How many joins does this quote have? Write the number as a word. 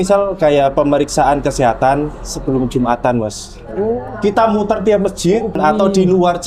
one